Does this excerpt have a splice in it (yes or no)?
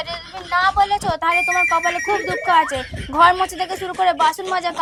no